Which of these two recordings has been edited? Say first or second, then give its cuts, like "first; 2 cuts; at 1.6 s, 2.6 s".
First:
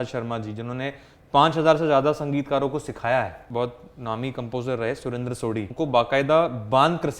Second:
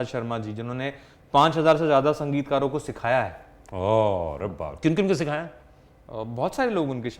first; 2 cuts; at 3.4 s, 5.7 s